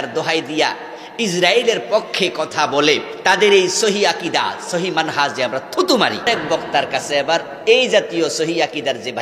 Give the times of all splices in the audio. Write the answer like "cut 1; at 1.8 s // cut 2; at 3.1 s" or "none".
cut 1; at 3.1 s // cut 2; at 6.3 s